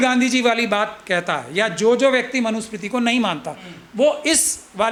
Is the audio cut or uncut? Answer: uncut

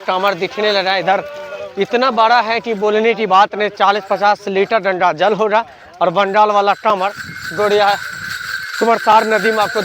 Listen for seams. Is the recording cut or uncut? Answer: uncut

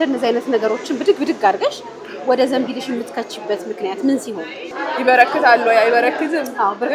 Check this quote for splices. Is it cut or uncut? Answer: cut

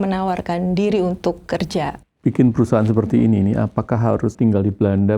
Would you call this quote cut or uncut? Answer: cut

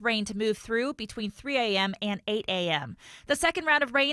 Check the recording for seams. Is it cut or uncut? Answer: cut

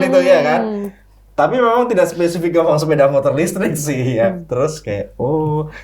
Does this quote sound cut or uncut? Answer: uncut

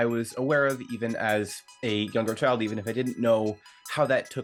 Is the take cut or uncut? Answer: uncut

